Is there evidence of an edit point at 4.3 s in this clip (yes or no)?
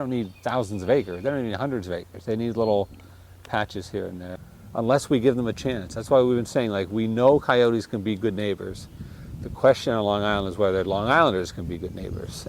yes